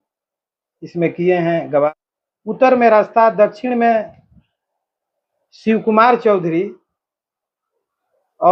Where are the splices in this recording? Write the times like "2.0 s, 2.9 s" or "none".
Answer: 1.9 s